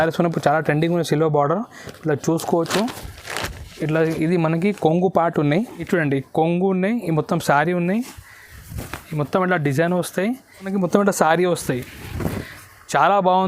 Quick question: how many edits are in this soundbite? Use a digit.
2